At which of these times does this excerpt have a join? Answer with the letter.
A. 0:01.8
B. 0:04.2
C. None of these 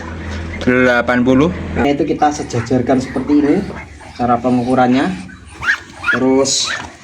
A